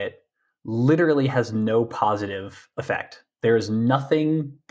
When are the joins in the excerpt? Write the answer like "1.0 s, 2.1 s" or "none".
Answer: none